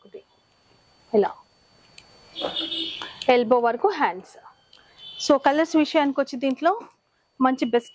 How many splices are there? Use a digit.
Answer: 0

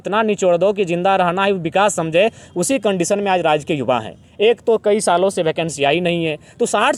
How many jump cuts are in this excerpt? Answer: 0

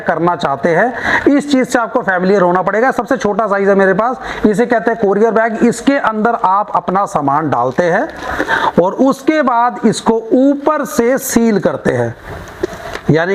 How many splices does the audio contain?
0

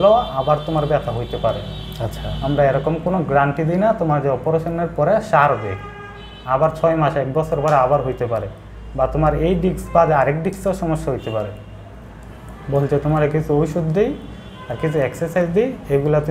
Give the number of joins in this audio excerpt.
0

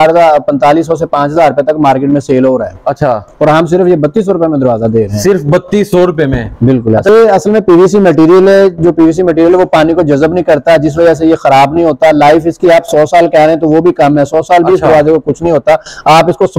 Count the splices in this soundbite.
1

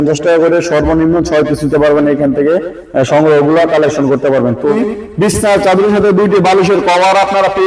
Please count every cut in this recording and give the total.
1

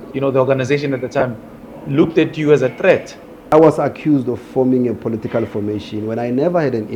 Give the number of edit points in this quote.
1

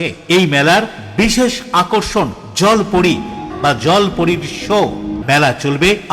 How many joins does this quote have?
2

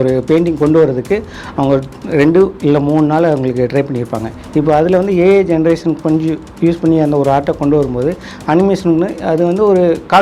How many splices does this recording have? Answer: 0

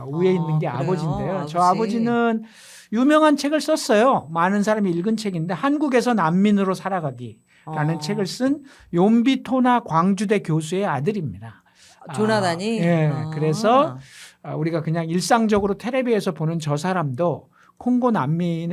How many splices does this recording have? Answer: 0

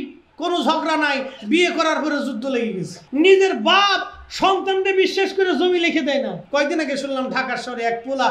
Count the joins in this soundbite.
2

